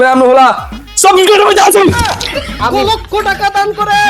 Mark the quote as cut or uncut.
cut